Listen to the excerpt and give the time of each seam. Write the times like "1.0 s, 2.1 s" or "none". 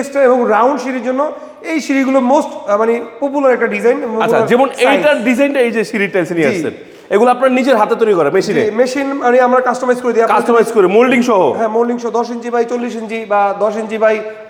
none